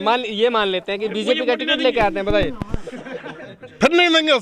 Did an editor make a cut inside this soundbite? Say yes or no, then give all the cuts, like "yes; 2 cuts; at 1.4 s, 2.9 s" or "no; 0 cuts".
no; 0 cuts